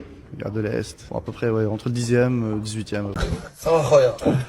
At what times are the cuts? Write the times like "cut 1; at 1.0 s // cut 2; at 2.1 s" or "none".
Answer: cut 1; at 3.1 s

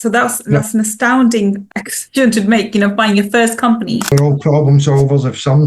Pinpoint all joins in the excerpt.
cut 1; at 1.7 s // cut 2; at 4.1 s

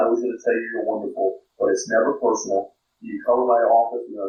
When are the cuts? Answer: none

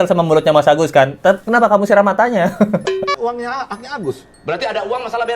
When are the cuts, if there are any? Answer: cut 1; at 3.2 s

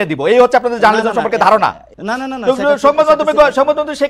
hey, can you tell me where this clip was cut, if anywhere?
cut 1; at 1.9 s

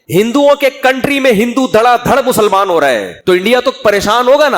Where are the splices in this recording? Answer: cut 1; at 3.1 s

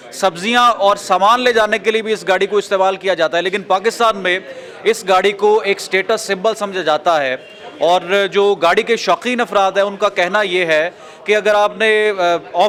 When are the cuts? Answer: none

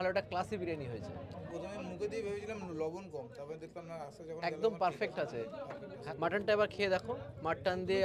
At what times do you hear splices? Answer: none

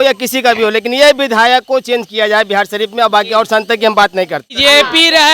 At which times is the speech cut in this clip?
cut 1; at 4.4 s

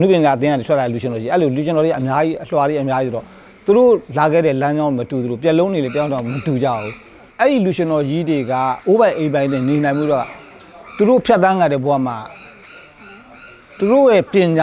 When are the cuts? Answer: cut 1; at 7.3 s

